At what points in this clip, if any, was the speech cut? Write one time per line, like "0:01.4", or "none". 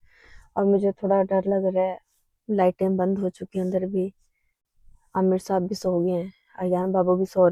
none